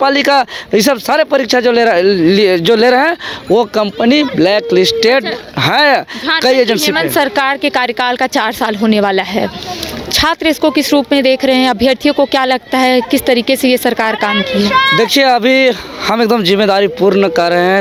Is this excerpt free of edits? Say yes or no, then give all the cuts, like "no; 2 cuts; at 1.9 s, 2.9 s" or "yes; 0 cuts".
yes; 0 cuts